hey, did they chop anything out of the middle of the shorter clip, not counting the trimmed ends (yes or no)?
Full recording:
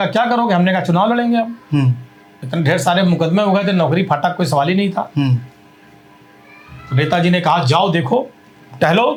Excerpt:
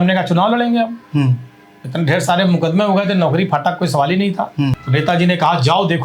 yes